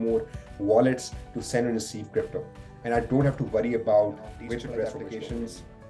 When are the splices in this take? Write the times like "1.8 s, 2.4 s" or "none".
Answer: 4.8 s